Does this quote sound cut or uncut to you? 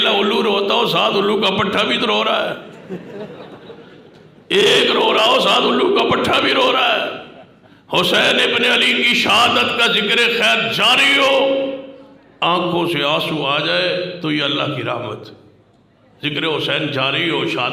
uncut